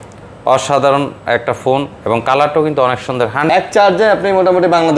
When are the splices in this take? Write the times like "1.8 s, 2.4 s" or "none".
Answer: 3.5 s